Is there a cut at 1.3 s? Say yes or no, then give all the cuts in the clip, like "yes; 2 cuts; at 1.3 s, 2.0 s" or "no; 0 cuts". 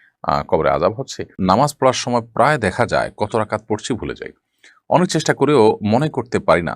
yes; 1 cut; at 1.3 s